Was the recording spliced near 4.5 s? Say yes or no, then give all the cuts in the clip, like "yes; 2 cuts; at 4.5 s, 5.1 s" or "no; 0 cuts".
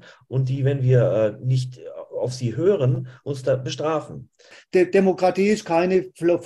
yes; 1 cut; at 4.5 s